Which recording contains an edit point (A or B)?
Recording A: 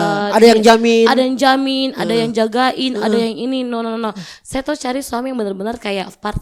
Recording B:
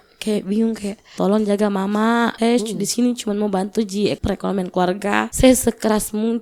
B